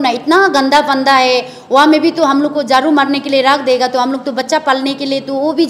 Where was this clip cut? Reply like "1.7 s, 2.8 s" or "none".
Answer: none